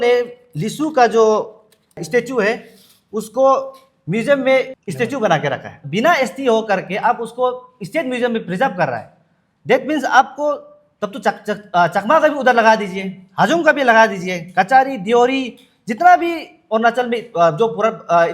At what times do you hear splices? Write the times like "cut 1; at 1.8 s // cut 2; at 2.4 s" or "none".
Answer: cut 1; at 2.0 s // cut 2; at 4.7 s // cut 3; at 5.8 s